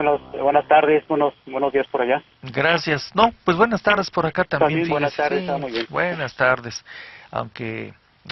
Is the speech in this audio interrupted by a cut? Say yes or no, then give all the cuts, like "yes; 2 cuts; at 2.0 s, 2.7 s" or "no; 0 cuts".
yes; 1 cut; at 4.7 s